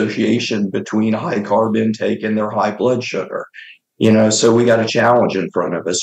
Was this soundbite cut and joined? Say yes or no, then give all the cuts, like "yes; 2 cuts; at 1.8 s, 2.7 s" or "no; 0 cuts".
no; 0 cuts